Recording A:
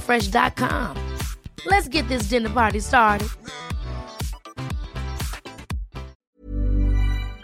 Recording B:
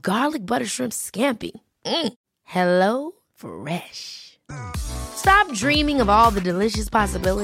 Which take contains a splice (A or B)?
A